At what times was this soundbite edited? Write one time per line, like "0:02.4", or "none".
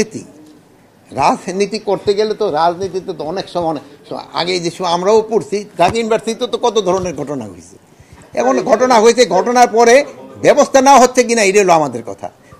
none